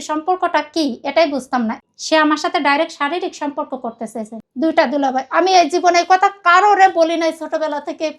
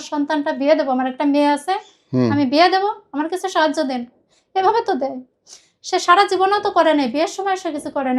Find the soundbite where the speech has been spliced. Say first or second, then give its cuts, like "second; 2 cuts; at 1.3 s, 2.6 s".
first; 2 cuts; at 1.8 s, 4.4 s